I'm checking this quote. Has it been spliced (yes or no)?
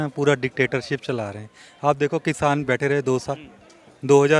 no